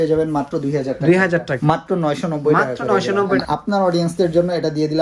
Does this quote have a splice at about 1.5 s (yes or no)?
yes